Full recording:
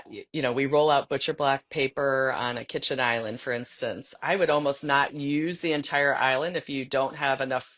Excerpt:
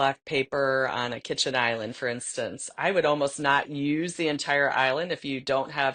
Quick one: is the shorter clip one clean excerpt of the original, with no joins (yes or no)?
yes